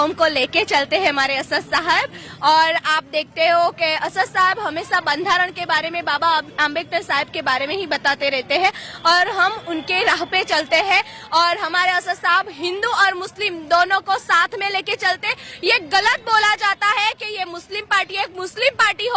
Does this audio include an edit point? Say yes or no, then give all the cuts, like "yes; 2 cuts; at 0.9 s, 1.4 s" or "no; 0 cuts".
no; 0 cuts